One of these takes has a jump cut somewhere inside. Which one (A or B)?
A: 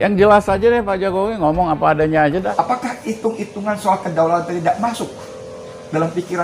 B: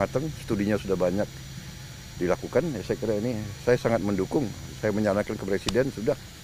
A